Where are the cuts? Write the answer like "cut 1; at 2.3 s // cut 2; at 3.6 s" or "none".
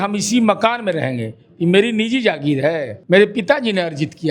cut 1; at 2.9 s